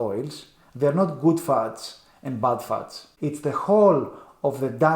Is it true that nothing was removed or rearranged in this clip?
no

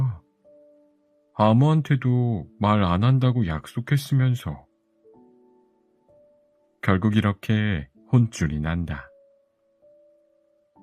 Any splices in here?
no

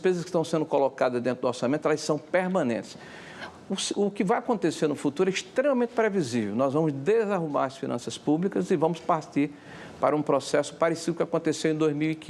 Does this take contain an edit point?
no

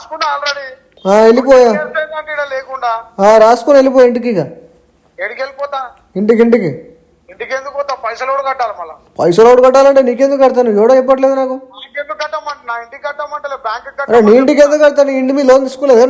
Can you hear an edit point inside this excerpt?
no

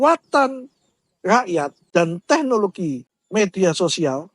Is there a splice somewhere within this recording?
yes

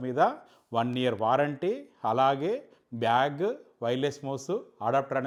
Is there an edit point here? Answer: no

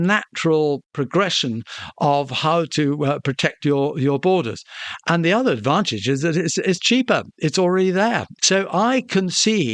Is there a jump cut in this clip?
yes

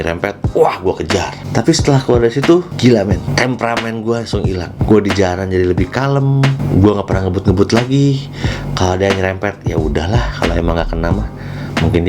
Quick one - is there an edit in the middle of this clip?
yes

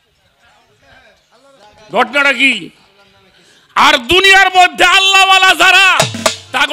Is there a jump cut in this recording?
no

